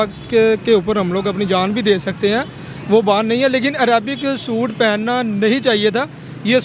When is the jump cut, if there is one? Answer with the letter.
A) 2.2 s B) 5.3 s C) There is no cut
B